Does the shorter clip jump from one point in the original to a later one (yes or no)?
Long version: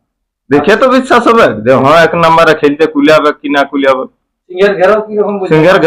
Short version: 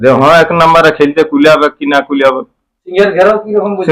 no